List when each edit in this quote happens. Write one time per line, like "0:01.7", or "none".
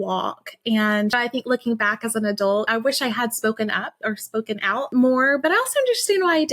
0:01.2
0:02.7
0:04.9